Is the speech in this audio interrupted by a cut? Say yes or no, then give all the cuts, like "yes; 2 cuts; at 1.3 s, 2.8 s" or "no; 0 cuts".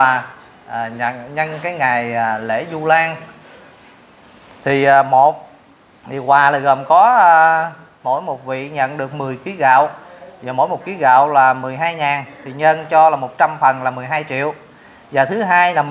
no; 0 cuts